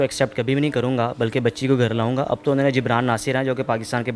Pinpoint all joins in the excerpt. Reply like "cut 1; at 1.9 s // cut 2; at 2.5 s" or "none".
none